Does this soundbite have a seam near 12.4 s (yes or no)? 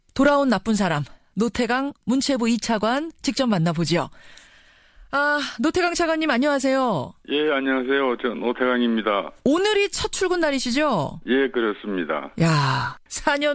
no